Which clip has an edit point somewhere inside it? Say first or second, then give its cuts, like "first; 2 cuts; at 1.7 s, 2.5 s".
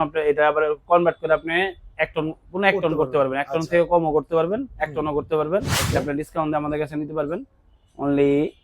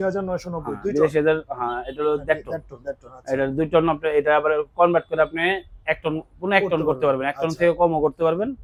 first; 1 cut; at 5.8 s